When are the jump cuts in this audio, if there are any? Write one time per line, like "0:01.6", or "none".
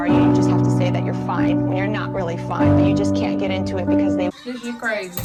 none